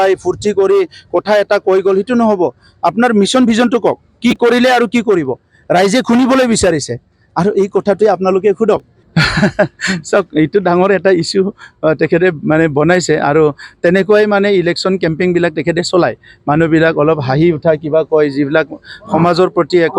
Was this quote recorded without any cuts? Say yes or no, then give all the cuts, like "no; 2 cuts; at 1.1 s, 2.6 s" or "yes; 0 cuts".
no; 1 cut; at 9.0 s